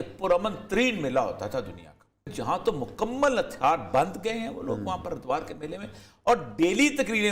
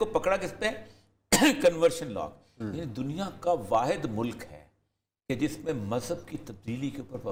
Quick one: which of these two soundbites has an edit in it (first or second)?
first